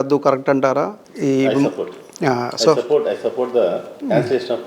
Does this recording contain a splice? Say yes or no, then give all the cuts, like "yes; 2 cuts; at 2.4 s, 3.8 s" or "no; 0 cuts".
no; 0 cuts